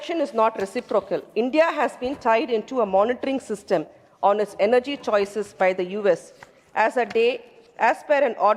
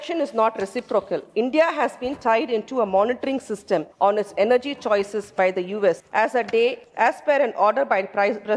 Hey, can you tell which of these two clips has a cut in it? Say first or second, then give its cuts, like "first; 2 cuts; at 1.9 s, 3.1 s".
second; 3 cuts; at 3.9 s, 6.0 s, 6.8 s